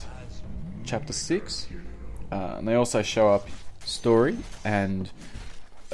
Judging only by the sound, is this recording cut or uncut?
uncut